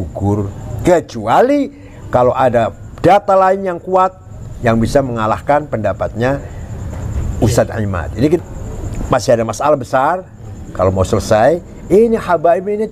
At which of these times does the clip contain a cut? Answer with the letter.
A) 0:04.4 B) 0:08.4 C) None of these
B